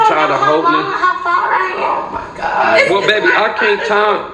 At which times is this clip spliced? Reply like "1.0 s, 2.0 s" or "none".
none